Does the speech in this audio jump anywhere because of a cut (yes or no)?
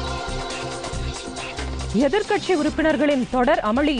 yes